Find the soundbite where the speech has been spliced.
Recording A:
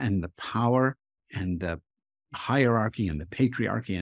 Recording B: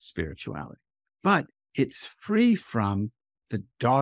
A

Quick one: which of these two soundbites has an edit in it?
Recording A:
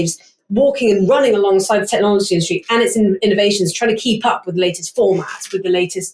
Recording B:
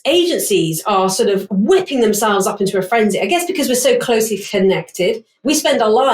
B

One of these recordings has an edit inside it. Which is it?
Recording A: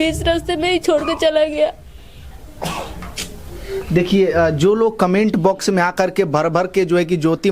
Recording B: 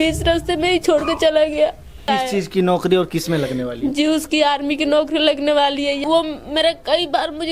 B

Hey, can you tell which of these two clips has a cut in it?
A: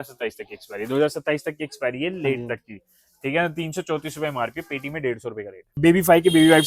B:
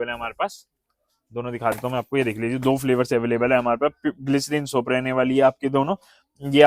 A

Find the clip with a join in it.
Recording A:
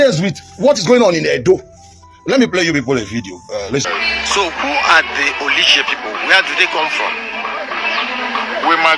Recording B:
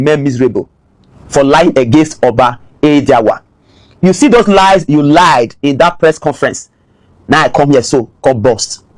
A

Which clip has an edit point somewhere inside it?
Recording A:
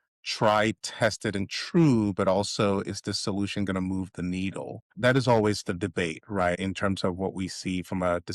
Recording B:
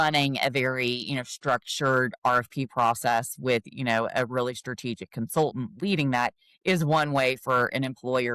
A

